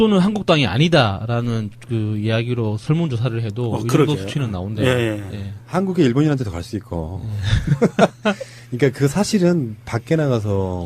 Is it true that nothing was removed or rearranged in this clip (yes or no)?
no